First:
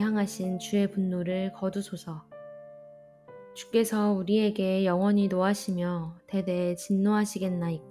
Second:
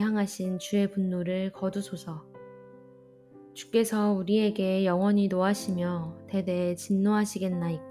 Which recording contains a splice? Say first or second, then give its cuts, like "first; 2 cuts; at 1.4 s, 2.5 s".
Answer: second; 2 cuts; at 2.3 s, 3.7 s